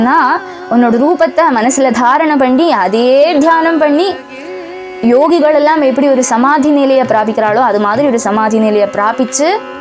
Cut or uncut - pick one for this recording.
uncut